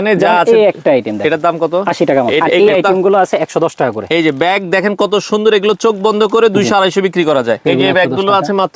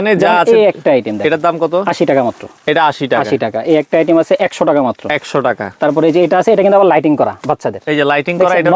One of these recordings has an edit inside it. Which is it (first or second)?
first